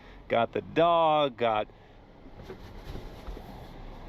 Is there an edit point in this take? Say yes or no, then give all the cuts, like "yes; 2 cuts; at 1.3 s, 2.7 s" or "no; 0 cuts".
no; 0 cuts